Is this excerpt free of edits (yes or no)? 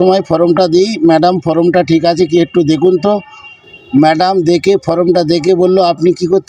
yes